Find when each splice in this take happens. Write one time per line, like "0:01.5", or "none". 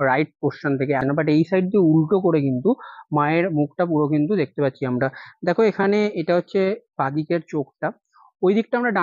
0:01.0